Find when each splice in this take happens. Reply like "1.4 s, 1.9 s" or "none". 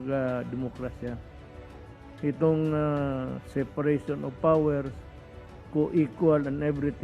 none